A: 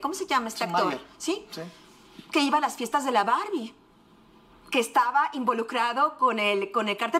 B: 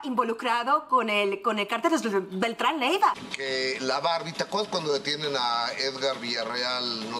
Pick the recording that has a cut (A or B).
B